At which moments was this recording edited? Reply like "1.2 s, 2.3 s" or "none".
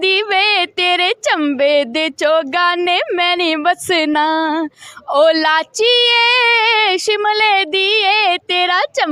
none